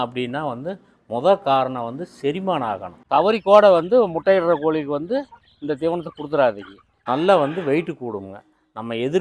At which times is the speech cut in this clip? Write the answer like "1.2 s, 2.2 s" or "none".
2.9 s, 6.9 s

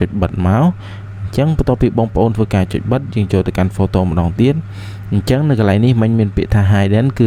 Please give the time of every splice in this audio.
none

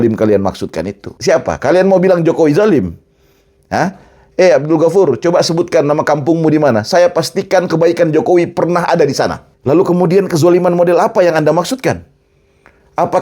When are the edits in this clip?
1.1 s, 9.5 s

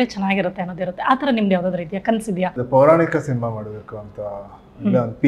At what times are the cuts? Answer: 2.6 s

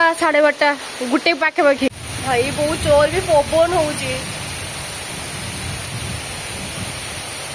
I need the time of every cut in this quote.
1.9 s

